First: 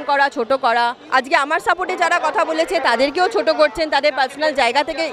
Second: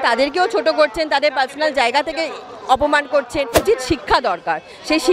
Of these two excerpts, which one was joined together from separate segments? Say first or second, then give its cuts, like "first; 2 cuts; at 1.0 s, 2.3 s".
second; 1 cut; at 3.6 s